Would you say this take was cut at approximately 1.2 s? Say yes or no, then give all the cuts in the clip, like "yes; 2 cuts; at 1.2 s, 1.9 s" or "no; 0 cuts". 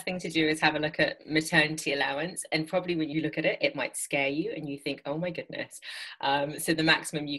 yes; 2 cuts; at 1.2 s, 3.1 s